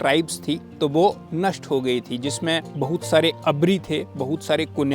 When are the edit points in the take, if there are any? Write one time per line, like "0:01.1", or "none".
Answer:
0:01.2
0:02.7